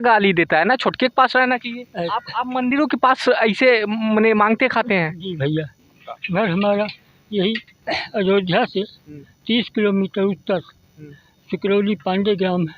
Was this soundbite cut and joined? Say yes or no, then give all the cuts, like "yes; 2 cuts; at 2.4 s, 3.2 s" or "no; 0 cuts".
yes; 2 cuts; at 2.0 s, 6.1 s